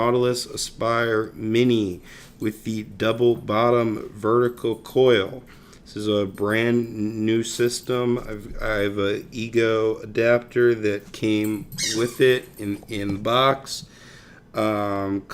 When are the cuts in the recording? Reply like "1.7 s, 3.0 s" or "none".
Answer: 10.5 s